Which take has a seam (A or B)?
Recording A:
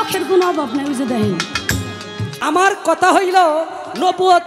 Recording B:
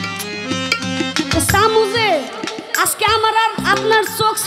A